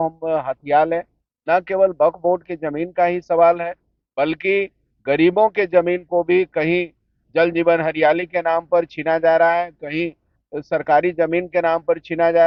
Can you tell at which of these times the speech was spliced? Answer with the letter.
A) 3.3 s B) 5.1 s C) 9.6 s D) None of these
D